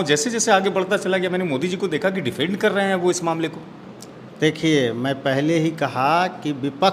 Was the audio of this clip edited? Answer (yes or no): no